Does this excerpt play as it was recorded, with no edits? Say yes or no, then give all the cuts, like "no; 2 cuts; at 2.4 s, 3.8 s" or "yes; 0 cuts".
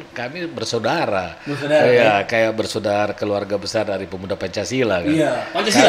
yes; 0 cuts